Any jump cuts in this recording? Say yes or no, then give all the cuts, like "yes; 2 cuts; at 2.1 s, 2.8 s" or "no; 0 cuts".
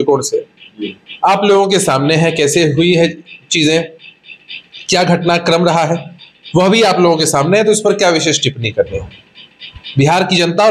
no; 0 cuts